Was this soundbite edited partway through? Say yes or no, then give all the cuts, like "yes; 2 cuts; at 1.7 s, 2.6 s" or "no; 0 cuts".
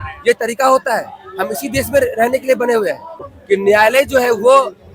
yes; 1 cut; at 3.3 s